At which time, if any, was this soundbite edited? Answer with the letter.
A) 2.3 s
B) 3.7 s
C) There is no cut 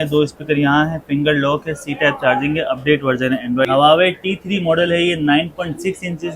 B